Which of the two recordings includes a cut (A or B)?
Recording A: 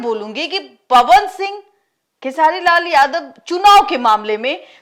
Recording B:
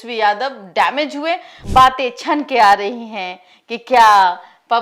B